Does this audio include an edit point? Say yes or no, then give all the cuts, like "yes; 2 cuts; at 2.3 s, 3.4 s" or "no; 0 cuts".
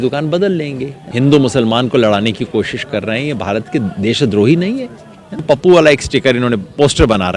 yes; 2 cuts; at 1.0 s, 5.4 s